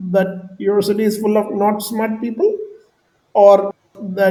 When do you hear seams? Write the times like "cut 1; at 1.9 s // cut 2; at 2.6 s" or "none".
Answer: none

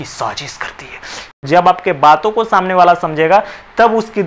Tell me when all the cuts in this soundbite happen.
cut 1; at 1.4 s

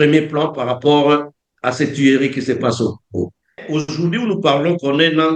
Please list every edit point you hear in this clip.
cut 1; at 3.6 s

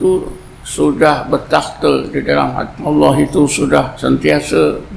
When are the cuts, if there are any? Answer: cut 1; at 2.8 s // cut 2; at 3.9 s

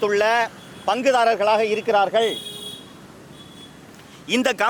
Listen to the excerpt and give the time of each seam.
none

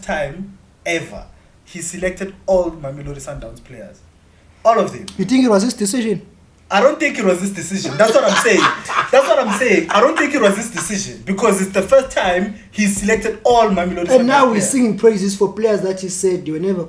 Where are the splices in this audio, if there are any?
none

